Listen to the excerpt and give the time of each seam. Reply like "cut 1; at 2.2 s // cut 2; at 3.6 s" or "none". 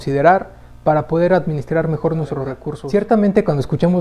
cut 1; at 2.7 s